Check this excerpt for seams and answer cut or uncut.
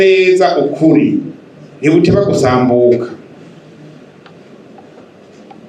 uncut